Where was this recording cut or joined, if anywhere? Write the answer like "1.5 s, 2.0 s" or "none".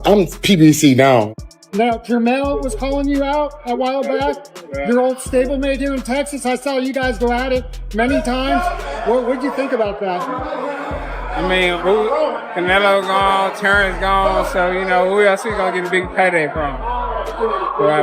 1.4 s

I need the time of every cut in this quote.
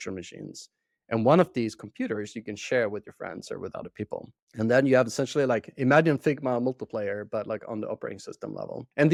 none

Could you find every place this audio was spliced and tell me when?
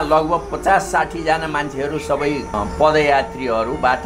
2.6 s

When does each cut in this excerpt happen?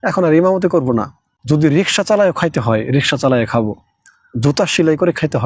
1.3 s

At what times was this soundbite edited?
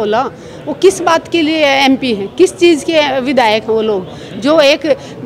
none

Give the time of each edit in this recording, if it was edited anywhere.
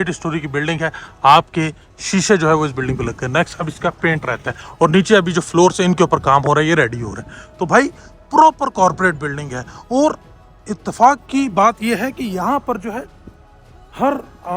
none

